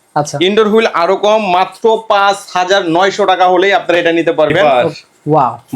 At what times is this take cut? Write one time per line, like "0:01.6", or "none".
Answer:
0:04.6